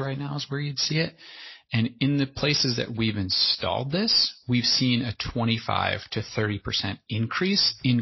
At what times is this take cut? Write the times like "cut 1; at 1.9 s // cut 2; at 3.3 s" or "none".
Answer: none